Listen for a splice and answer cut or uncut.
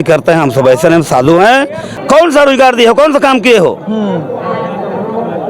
cut